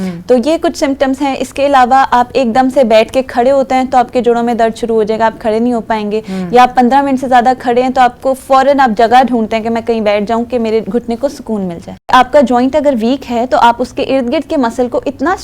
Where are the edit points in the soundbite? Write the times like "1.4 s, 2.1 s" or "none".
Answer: 12.1 s

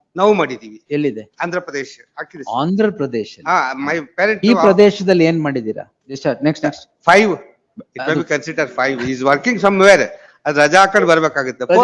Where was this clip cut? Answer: 6.0 s

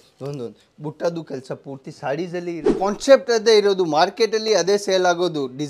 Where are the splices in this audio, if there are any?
2.6 s

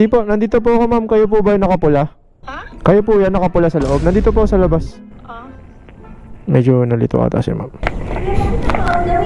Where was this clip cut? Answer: none

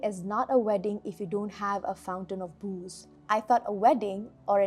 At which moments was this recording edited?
3.1 s

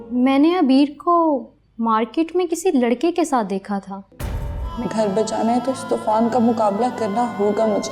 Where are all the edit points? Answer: 4.6 s

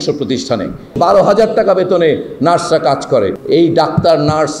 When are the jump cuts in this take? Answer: 0.9 s, 3.4 s

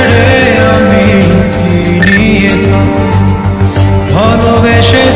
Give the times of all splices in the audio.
none

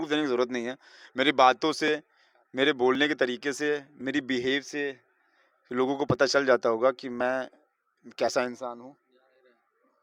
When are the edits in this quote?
none

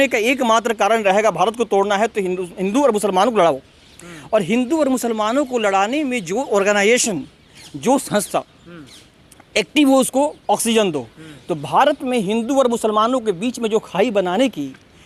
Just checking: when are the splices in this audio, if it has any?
none

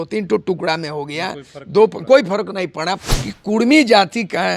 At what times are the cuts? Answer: 3.1 s

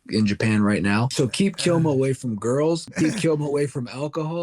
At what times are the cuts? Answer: 1.1 s, 2.9 s

